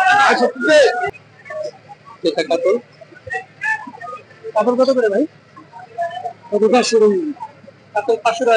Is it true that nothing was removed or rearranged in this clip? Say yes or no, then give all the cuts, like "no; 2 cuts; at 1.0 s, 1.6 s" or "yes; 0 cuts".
no; 1 cut; at 1.1 s